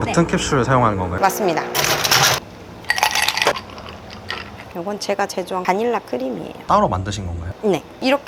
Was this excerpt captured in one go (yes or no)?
yes